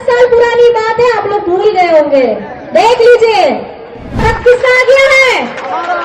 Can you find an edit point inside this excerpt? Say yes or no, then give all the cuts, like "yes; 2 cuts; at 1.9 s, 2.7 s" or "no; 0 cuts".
yes; 1 cut; at 4.2 s